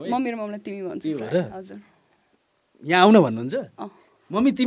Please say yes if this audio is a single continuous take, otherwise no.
yes